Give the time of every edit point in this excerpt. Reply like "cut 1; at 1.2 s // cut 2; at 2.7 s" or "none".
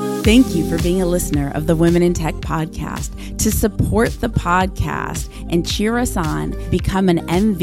none